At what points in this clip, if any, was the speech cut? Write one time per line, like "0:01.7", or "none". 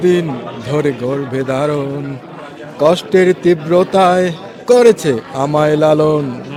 none